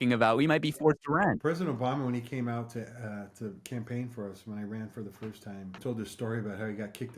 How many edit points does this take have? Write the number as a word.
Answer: two